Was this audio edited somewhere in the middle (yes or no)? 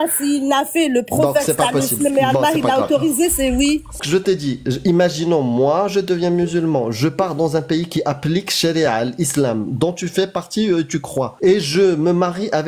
yes